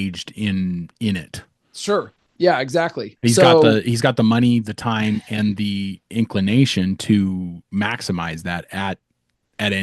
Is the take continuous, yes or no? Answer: yes